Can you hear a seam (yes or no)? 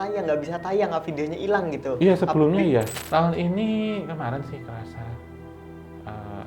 yes